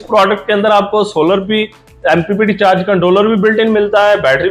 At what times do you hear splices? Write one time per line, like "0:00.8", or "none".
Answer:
none